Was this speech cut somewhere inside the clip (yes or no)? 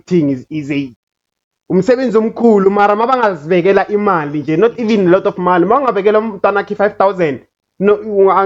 no